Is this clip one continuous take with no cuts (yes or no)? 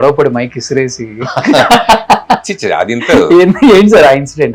yes